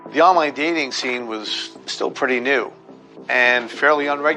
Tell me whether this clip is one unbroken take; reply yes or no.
yes